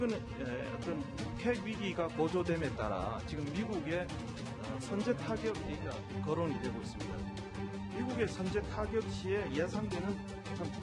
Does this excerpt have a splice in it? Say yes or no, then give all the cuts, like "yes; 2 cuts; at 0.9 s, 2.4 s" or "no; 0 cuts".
yes; 1 cut; at 5.8 s